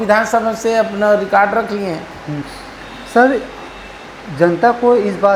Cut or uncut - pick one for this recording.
cut